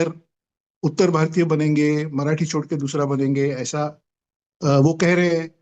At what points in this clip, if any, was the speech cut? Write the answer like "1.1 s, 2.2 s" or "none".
none